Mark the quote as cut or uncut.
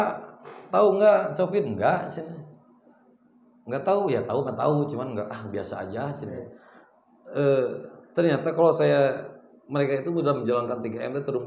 uncut